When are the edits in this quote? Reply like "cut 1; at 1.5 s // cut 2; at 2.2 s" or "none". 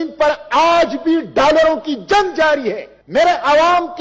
cut 1; at 2.9 s